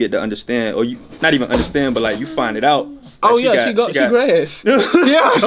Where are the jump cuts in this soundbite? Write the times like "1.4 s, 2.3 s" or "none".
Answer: none